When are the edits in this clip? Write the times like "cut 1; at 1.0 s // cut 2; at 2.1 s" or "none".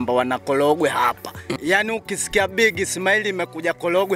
cut 1; at 1.6 s